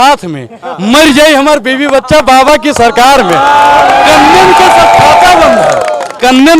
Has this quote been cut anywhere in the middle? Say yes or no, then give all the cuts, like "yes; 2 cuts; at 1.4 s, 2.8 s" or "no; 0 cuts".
no; 0 cuts